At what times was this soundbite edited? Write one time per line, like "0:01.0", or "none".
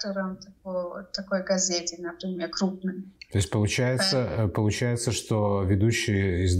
none